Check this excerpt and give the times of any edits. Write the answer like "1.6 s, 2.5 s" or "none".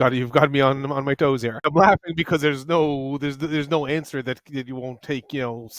1.8 s